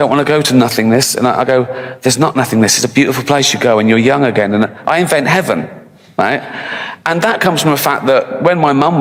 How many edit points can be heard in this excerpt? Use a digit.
0